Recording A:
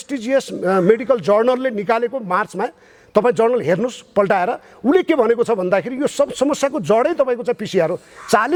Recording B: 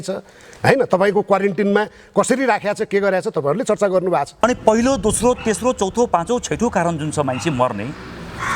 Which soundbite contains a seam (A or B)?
B